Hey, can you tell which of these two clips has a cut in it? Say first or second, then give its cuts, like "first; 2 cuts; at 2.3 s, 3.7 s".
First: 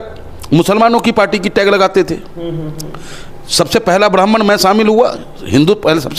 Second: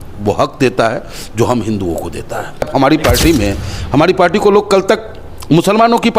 second; 1 cut; at 2.7 s